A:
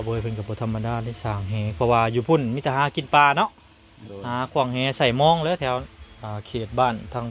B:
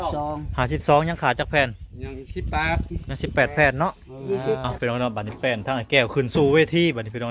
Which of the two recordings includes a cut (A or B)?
B